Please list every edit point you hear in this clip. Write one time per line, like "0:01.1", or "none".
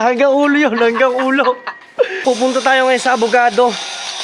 0:02.1